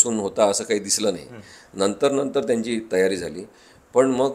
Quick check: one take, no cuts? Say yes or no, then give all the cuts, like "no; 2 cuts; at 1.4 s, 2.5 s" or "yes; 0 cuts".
yes; 0 cuts